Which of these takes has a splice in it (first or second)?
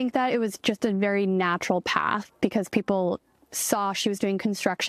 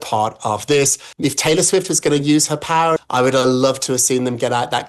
second